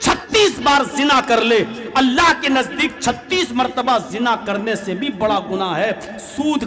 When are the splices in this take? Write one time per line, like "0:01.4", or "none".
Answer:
none